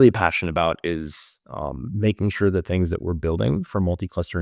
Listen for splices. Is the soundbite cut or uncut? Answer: uncut